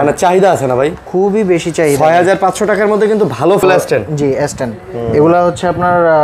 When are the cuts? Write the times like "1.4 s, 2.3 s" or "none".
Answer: 3.6 s